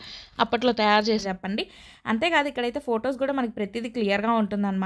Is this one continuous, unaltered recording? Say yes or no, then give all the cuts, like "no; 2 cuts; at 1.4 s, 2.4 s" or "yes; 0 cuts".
no; 1 cut; at 1.2 s